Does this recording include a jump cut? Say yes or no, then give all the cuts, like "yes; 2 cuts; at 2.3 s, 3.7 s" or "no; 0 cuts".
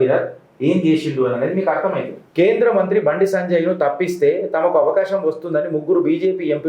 yes; 1 cut; at 2.2 s